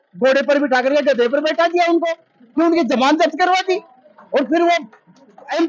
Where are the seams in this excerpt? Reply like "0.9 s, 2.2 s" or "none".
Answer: none